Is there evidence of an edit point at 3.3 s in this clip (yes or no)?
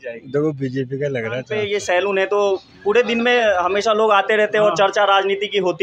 no